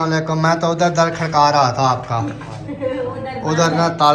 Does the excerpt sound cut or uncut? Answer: uncut